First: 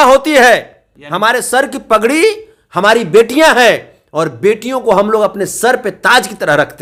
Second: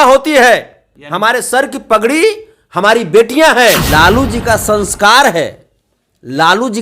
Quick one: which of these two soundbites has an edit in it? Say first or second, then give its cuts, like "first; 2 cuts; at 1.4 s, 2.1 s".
second; 1 cut; at 3.9 s